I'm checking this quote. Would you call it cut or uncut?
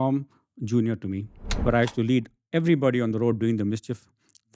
cut